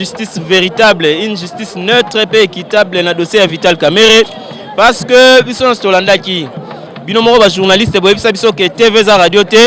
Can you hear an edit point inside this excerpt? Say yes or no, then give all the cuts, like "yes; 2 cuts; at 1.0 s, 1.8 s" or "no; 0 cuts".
no; 0 cuts